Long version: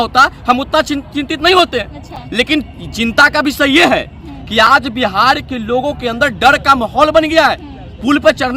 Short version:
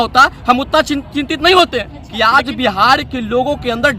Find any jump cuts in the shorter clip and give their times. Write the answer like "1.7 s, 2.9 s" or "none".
2.3 s